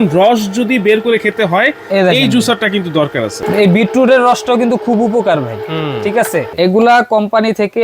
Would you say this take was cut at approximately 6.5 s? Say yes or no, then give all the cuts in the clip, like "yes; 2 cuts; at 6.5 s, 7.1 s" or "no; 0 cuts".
yes; 2 cuts; at 3.4 s, 6.5 s